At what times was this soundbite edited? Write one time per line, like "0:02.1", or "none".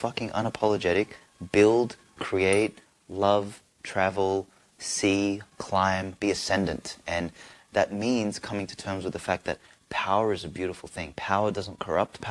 0:06.2